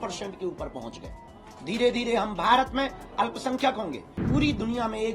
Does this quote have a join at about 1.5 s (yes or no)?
no